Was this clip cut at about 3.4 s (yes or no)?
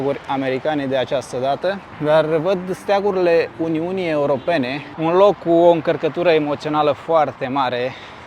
no